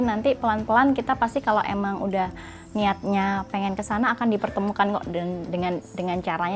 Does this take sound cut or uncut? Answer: uncut